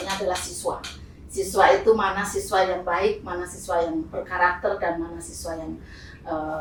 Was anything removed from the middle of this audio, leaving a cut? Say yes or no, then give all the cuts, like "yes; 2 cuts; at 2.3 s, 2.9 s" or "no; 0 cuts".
no; 0 cuts